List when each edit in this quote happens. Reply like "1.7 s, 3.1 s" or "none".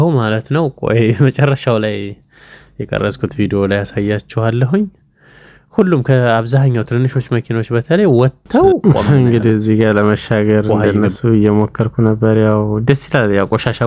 8.8 s